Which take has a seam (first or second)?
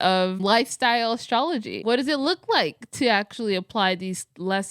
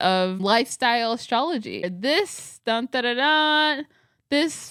first